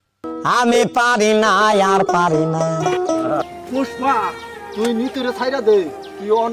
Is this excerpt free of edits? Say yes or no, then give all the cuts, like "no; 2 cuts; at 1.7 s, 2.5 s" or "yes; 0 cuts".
no; 1 cut; at 3.5 s